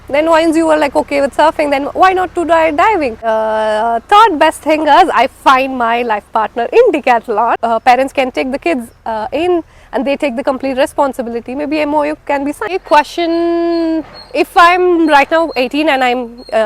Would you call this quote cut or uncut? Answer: cut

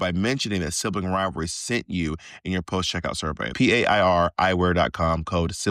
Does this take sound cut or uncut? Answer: cut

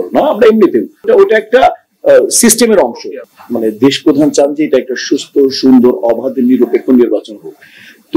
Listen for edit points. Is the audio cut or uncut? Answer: cut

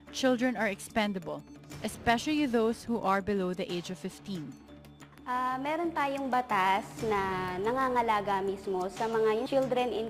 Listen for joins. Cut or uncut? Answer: cut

